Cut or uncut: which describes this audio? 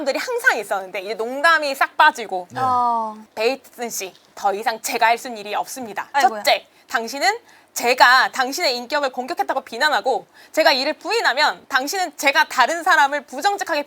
cut